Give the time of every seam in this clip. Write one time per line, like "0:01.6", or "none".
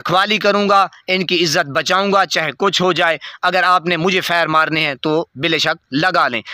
none